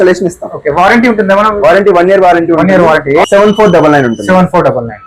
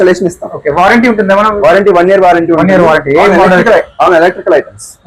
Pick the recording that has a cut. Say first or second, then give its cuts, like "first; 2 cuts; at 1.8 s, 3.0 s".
first; 1 cut; at 3.2 s